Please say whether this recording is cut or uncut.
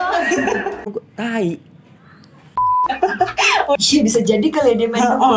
cut